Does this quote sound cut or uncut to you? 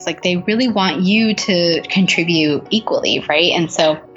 uncut